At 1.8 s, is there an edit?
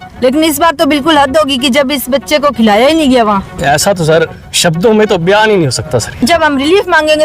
no; 2 cuts; at 3.5 s, 6.1 s

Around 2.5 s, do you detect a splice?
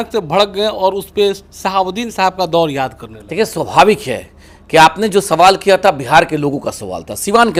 no; 0 cuts

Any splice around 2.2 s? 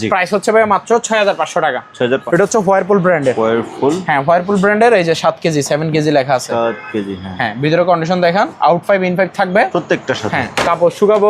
yes; 1 cut; at 2.2 s

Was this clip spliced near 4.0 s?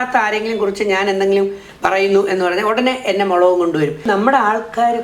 yes; 1 cut; at 4.0 s

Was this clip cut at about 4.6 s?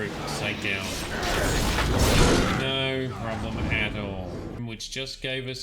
yes; 1 cut; at 4.6 s

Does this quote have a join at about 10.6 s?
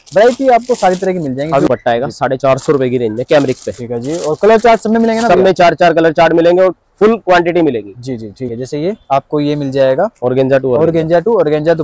no; 2 cuts; at 1.7 s, 8.5 s

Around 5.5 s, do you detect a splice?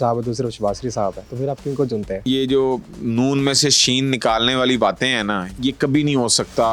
yes; 3 cuts; at 1.3 s, 2.2 s, 5.5 s

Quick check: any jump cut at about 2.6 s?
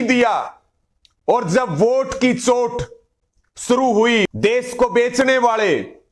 no; 1 cut; at 4.3 s

